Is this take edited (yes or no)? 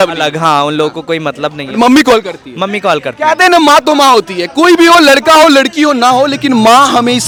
no